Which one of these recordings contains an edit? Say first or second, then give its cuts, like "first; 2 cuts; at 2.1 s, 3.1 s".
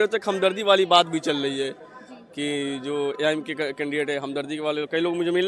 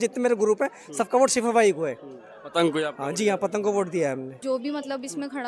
second; 1 cut; at 4.3 s